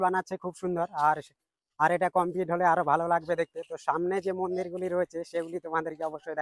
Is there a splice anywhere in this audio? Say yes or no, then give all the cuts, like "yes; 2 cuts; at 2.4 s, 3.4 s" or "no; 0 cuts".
no; 0 cuts